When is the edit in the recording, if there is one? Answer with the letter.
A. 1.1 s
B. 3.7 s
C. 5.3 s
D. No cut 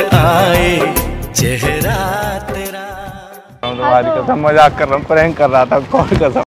B